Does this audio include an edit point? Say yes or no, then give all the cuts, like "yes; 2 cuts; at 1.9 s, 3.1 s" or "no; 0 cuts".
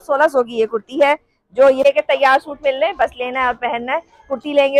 yes; 1 cut; at 1.9 s